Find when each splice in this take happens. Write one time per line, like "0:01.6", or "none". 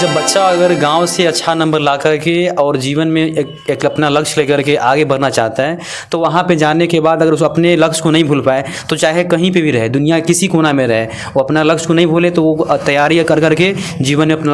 none